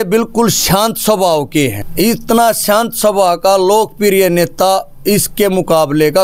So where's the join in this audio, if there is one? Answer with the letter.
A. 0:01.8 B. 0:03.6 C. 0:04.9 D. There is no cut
A